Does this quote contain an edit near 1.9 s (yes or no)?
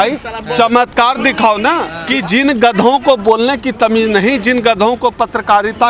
yes